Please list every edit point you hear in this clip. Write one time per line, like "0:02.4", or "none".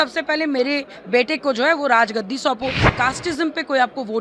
0:02.8